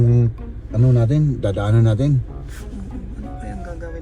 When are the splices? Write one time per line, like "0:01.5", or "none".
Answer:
none